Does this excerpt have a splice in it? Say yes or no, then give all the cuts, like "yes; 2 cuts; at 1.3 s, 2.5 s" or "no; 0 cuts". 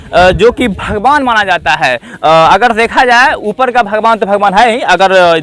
no; 0 cuts